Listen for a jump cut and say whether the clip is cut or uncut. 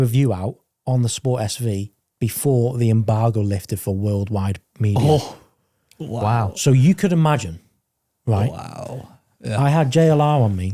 uncut